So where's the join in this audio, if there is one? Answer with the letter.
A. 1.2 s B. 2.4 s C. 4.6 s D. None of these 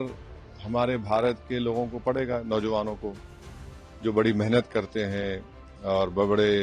D